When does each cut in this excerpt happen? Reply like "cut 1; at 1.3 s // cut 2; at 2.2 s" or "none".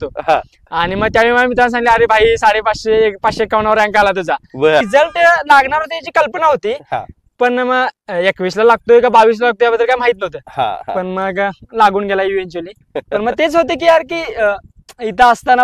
cut 1; at 4.9 s

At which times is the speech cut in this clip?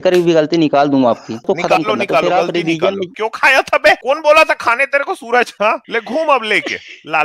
cut 1; at 1.4 s // cut 2; at 3.1 s

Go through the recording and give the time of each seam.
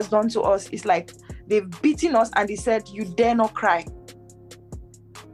none

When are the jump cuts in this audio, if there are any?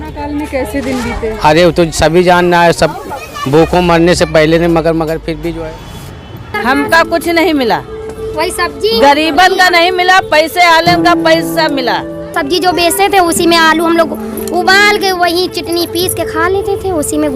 cut 1; at 6.4 s // cut 2; at 12.4 s

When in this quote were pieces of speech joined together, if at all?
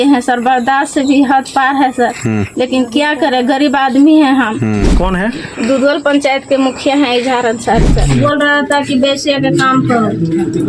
cut 1; at 4.9 s // cut 2; at 8.0 s

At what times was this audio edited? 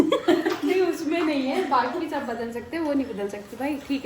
none

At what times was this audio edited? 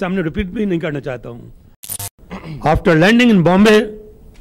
cut 1; at 1.9 s

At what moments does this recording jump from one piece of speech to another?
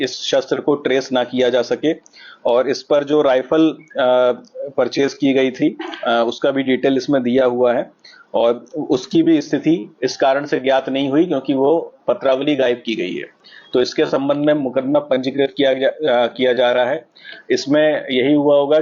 none

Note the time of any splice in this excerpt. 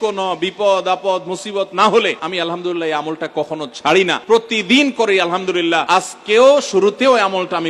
cut 1; at 2.2 s // cut 2; at 4.2 s // cut 3; at 5.8 s

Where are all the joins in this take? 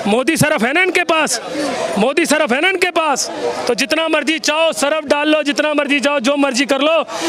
none

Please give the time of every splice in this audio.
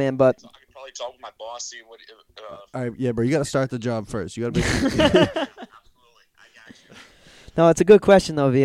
none

